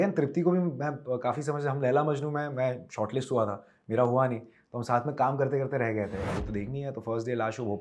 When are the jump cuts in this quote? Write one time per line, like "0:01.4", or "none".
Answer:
0:06.3